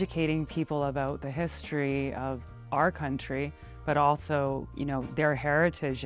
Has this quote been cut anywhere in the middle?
yes; 1 cut; at 4.7 s

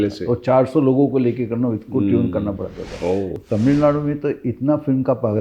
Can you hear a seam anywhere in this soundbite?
yes; 1 cut; at 3.4 s

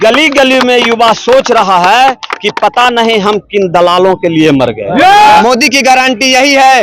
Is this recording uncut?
no; 1 cut; at 5.4 s

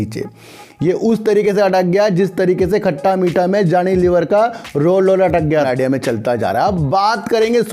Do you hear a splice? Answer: yes; 1 cut; at 5.6 s

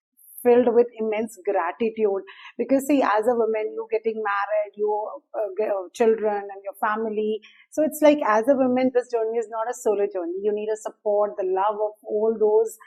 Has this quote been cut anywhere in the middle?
no; 0 cuts

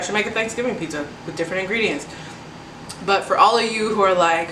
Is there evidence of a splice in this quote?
no; 0 cuts

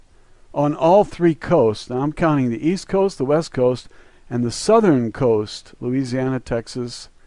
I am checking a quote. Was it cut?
yes; 1 cut; at 2.2 s

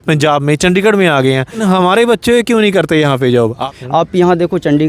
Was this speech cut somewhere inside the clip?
yes; 2 cuts; at 1.6 s, 3.6 s

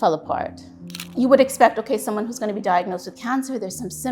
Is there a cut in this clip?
yes; 1 cut; at 0.9 s

